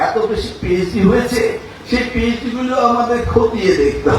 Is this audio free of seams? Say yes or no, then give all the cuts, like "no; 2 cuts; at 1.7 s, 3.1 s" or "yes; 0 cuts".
yes; 0 cuts